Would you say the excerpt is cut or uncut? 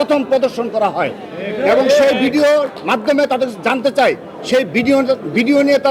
uncut